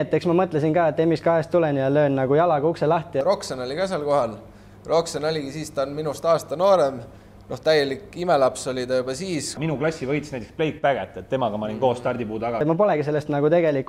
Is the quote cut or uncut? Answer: cut